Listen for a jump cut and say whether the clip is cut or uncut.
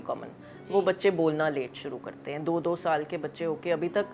uncut